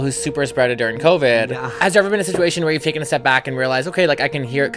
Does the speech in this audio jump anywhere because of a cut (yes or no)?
no